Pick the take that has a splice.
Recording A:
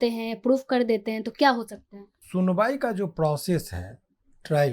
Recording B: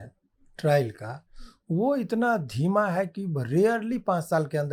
A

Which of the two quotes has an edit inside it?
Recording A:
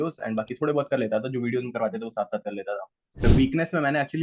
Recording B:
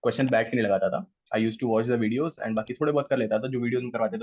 A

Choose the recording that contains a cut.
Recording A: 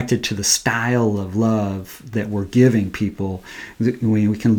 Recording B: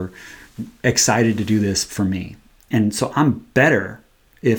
B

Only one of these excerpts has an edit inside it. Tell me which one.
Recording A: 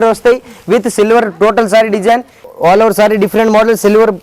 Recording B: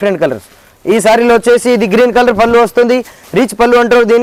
A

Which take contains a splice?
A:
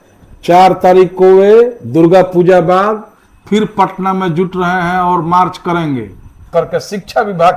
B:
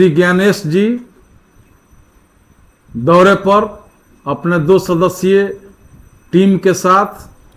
A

